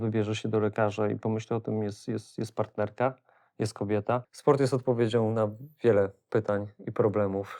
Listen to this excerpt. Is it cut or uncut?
cut